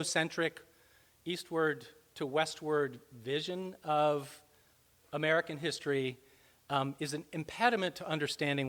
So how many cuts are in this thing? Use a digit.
0